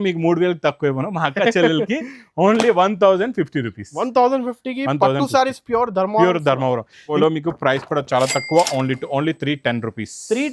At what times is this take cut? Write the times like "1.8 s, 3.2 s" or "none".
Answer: 7.2 s

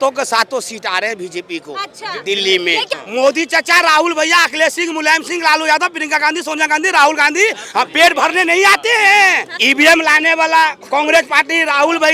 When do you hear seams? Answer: 2.8 s, 9.6 s

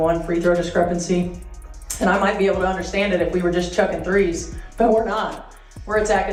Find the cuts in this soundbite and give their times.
none

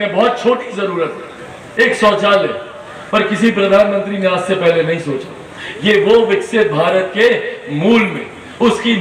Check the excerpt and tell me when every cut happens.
none

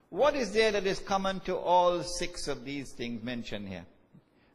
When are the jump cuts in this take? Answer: none

